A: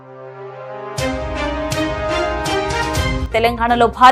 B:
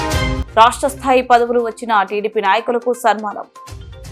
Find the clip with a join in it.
A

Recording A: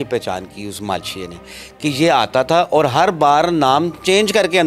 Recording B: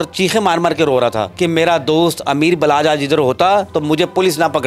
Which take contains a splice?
B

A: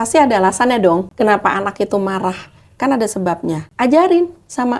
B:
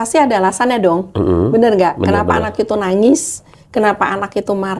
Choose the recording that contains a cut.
A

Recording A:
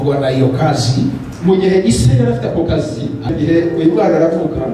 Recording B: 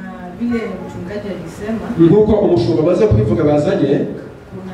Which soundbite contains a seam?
A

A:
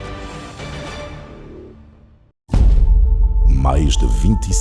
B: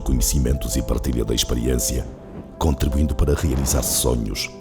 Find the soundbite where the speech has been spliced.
A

